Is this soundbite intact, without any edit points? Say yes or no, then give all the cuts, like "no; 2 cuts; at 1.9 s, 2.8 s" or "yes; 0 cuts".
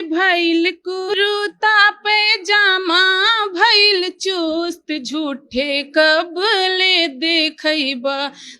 no; 1 cut; at 1.1 s